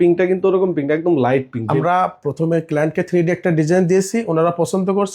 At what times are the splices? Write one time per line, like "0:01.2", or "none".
0:01.6